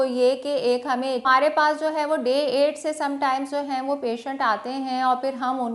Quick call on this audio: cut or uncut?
cut